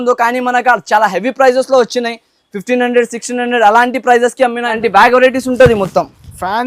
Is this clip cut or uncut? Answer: cut